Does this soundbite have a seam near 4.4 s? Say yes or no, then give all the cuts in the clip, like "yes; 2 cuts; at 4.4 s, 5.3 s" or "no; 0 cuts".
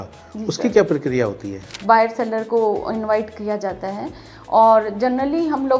no; 1 cut; at 1.7 s